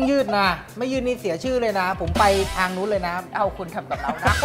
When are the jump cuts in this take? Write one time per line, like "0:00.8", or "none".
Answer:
0:03.2